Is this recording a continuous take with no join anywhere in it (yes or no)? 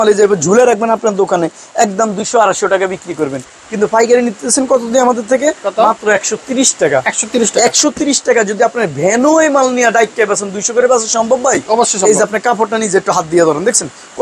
yes